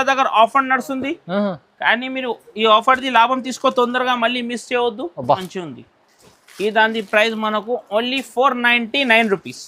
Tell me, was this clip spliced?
yes; 1 cut; at 5.4 s

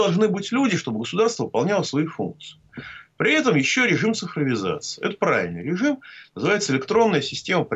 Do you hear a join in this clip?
no; 0 cuts

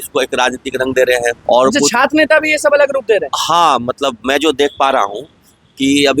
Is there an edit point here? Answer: yes; 1 cut; at 1.4 s

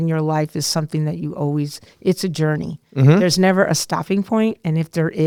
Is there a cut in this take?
no; 0 cuts

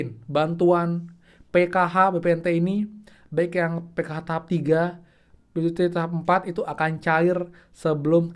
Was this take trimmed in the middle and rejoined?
no; 0 cuts

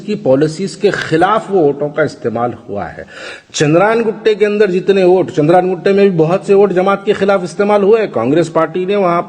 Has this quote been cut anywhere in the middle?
no; 0 cuts

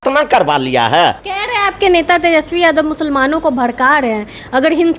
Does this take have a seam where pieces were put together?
yes; 1 cut; at 1.3 s

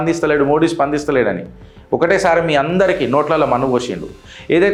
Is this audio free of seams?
yes; 0 cuts

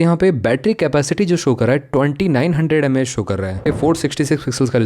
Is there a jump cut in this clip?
yes; 1 cut; at 3.6 s

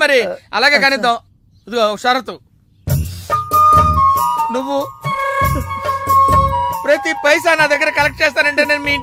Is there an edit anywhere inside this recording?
no; 0 cuts

